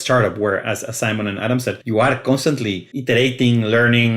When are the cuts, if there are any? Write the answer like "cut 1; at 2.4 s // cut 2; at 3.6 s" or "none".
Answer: cut 1; at 1.8 s // cut 2; at 2.9 s